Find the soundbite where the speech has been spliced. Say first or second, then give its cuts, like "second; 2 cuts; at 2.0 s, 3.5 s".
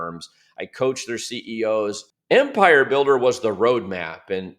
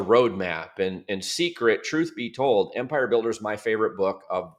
first; 1 cut; at 2.0 s